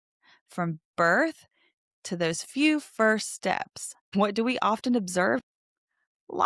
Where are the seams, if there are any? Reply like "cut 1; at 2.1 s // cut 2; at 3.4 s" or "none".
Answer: cut 1; at 4.1 s // cut 2; at 5.4 s